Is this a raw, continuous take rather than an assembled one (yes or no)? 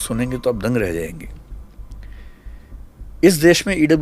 yes